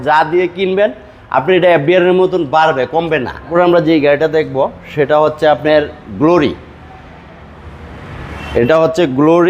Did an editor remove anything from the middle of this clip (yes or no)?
yes